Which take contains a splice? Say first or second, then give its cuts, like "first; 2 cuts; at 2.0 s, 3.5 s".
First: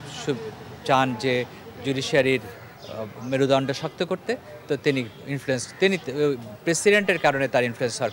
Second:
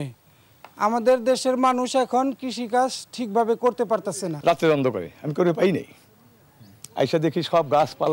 second; 1 cut; at 4.3 s